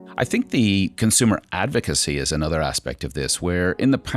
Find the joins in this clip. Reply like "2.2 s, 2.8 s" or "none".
0.9 s